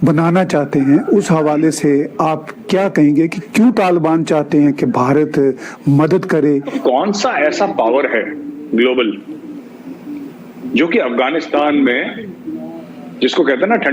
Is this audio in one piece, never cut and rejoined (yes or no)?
no